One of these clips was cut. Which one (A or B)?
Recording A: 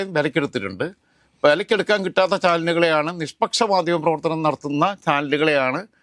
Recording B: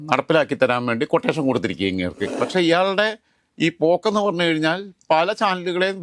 B